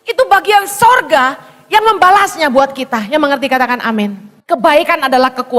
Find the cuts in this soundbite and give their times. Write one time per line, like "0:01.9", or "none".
0:04.3